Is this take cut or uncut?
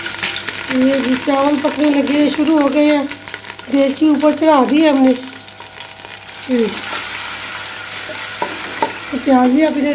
uncut